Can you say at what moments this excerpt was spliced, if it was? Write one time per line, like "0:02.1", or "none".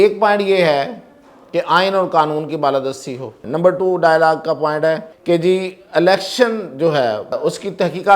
0:03.4
0:05.1
0:07.4